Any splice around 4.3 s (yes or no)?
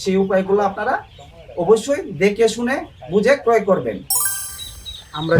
yes